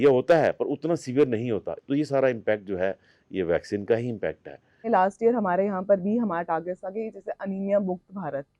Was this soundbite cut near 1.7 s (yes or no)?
yes